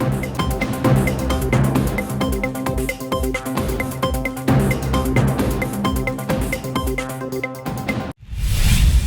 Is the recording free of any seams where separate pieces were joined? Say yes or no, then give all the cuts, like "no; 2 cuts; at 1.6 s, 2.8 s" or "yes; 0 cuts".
no; 1 cut; at 8.0 s